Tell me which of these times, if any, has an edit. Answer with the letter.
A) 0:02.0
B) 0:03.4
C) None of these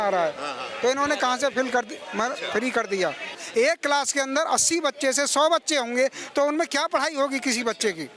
B